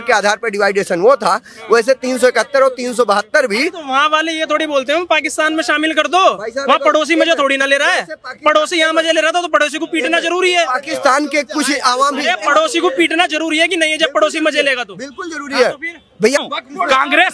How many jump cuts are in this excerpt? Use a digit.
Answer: 1